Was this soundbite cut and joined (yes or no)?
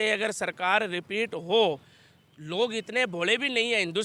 no